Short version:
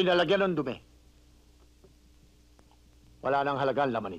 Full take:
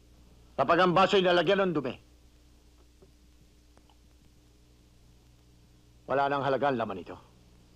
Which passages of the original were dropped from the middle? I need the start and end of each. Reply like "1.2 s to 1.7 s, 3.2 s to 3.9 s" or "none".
4.3 s to 6.0 s